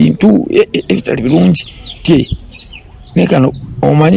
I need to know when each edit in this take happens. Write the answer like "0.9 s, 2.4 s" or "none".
none